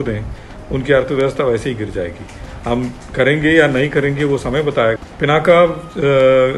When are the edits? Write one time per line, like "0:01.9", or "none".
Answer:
0:05.0